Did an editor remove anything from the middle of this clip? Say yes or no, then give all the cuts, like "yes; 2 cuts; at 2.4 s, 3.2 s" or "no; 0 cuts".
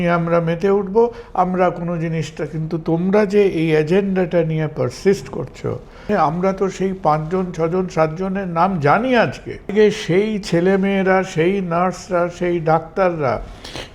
yes; 2 cuts; at 6.0 s, 9.7 s